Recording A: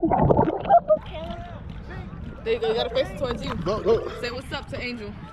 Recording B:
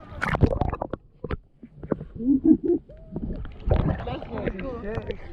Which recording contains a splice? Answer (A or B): A